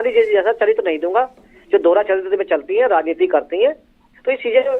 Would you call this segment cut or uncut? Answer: uncut